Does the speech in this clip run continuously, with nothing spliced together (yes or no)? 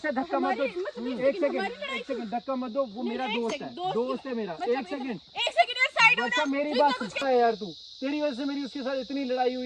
no